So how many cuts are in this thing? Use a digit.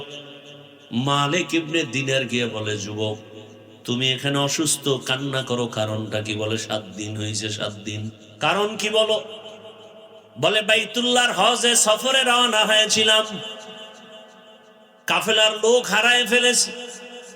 1